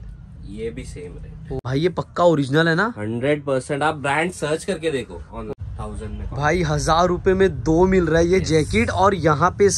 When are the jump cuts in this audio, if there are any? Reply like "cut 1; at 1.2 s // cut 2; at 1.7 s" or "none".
cut 1; at 1.5 s // cut 2; at 5.5 s